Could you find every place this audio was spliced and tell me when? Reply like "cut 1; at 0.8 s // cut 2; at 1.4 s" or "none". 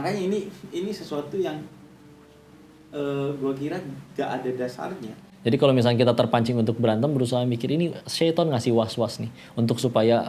cut 1; at 5.1 s